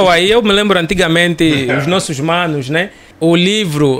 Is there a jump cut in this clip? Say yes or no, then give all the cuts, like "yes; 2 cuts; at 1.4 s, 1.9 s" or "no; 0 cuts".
yes; 1 cut; at 3.1 s